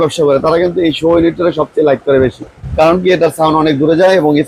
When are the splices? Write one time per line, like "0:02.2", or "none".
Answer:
none